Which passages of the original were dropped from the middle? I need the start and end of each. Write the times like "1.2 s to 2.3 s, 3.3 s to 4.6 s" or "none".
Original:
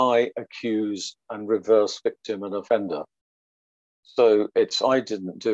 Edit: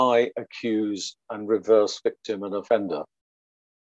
none